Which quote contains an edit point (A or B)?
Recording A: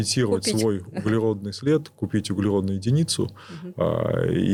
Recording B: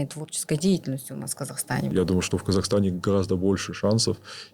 B